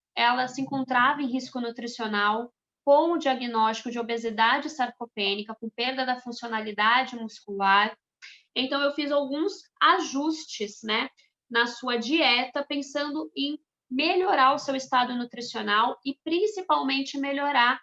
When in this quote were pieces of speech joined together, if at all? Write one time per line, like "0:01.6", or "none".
none